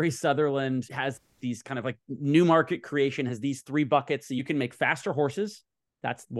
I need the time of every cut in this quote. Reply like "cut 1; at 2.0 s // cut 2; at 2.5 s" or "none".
cut 1; at 0.9 s